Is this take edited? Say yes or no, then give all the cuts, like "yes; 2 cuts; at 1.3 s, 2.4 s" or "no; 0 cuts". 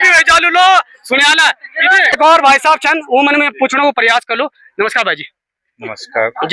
yes; 1 cut; at 2.2 s